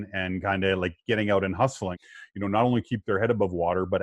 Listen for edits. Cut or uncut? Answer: cut